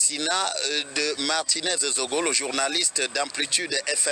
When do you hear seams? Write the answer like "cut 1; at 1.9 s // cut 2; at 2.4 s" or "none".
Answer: cut 1; at 1.2 s // cut 2; at 3.2 s